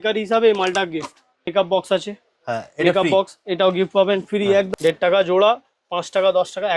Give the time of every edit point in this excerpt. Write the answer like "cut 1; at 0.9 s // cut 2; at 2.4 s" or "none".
cut 1; at 1.5 s // cut 2; at 4.7 s

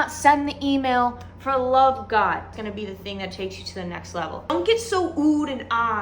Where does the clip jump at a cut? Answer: cut 1; at 2.5 s // cut 2; at 4.4 s

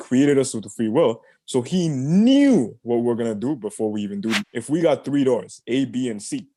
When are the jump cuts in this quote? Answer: cut 1; at 4.5 s

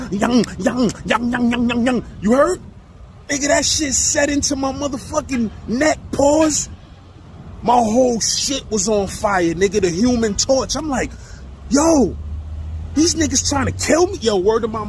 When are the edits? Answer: none

